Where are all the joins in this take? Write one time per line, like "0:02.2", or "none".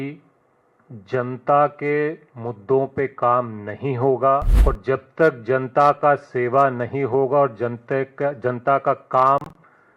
0:04.5